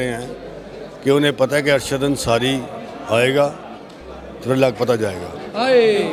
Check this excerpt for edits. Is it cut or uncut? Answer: uncut